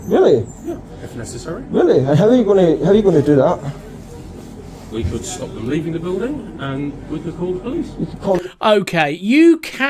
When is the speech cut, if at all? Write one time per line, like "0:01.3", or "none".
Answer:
none